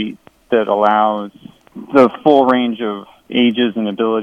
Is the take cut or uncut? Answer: cut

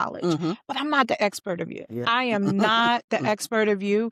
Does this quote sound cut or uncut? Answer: cut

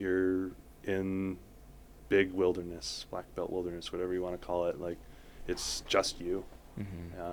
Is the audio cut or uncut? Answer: uncut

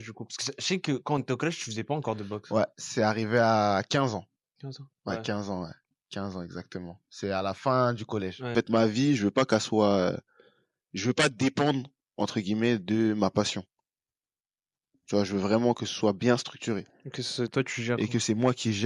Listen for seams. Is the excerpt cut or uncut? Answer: cut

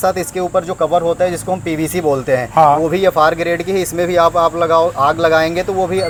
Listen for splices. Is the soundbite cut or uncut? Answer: uncut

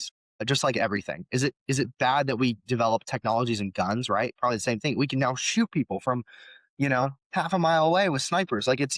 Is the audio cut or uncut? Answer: uncut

